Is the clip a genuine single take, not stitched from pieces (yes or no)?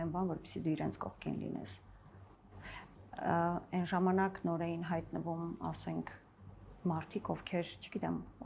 yes